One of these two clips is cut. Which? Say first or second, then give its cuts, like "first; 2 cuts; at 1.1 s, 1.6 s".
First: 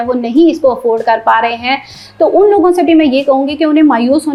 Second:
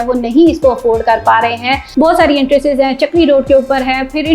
second; 1 cut; at 1.8 s